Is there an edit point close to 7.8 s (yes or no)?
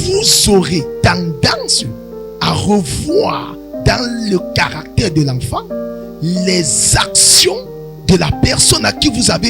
no